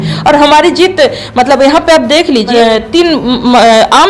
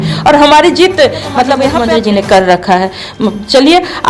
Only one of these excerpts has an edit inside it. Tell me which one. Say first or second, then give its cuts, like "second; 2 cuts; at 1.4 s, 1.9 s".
second; 1 cut; at 1.8 s